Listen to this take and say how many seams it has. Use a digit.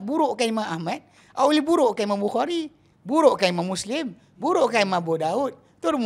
0